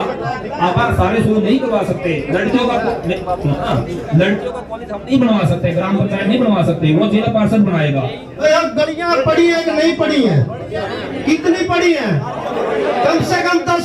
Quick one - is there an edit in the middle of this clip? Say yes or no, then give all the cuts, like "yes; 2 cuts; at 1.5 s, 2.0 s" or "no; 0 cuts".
yes; 1 cut; at 8.4 s